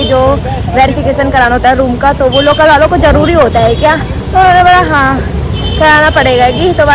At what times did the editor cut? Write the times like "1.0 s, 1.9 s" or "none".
none